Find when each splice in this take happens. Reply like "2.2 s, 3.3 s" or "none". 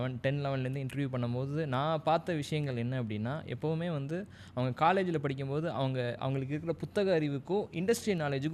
none